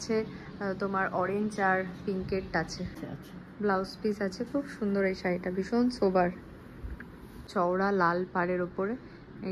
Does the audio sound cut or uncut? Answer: cut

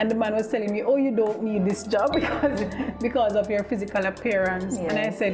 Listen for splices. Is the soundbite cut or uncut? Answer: uncut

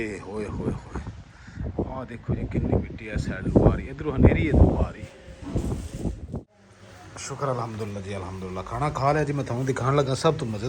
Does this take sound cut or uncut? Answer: cut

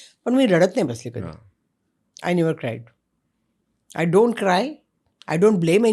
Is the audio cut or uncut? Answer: uncut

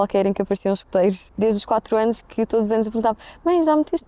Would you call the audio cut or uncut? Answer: cut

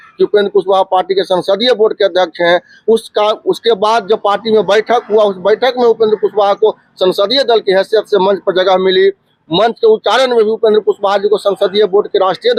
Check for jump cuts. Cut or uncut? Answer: uncut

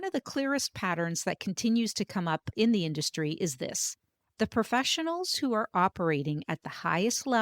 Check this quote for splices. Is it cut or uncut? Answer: uncut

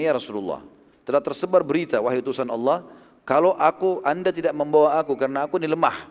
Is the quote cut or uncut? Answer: uncut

